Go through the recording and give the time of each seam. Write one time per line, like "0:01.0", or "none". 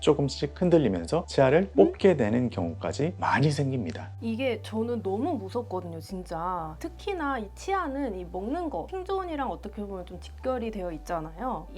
none

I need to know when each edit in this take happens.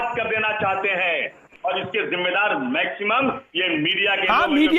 0:01.4

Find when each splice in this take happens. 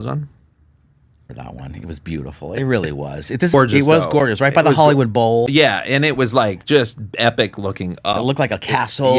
0:03.5

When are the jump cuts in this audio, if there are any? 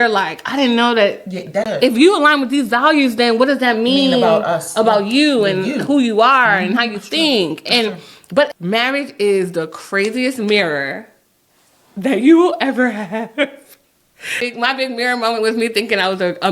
0:01.7
0:08.5
0:14.4

